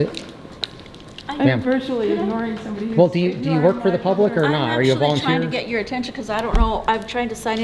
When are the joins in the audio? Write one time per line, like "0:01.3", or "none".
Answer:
none